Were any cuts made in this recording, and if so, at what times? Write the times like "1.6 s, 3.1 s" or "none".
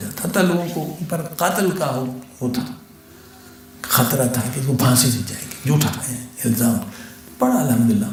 none